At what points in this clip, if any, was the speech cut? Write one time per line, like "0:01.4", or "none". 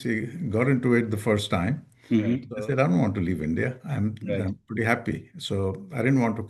0:02.5

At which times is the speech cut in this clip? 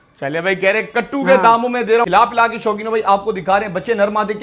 0:02.1

